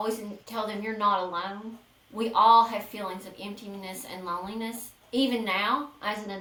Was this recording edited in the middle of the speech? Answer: no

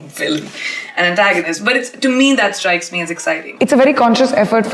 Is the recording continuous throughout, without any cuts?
no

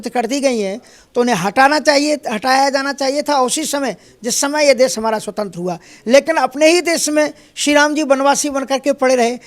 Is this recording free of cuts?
yes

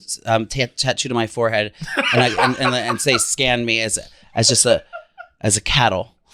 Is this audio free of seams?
yes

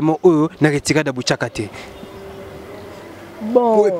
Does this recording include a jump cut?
no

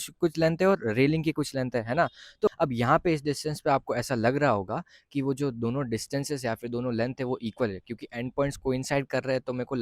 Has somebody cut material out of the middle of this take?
yes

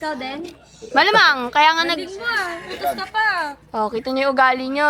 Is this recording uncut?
yes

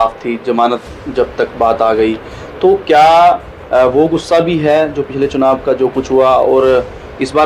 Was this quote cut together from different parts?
no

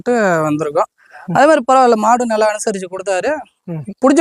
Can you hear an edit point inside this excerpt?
no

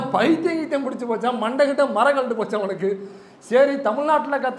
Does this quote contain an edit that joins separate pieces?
no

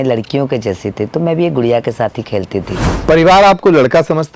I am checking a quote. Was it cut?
yes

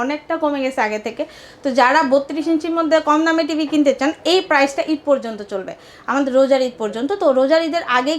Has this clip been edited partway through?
no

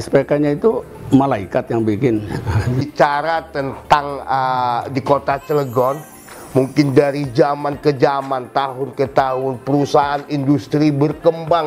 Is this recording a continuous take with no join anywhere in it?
no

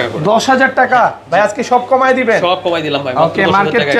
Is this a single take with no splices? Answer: yes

